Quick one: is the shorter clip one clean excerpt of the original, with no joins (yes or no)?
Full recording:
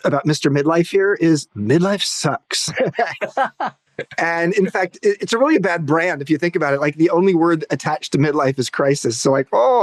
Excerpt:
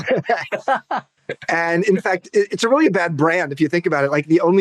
yes